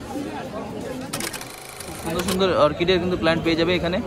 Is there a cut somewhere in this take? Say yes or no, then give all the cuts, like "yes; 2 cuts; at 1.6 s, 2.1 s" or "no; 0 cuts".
yes; 1 cut; at 1.5 s